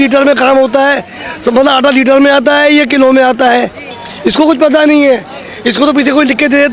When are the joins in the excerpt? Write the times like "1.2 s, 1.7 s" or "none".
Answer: none